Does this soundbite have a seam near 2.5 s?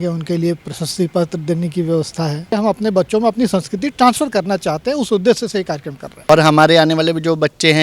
yes; 2 cuts; at 2.5 s, 6.3 s

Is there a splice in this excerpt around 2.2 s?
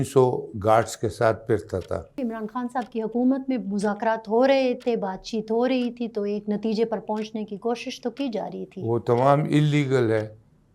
yes; 1 cut; at 2.2 s

